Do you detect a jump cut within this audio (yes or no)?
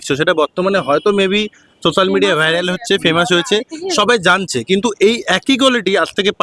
no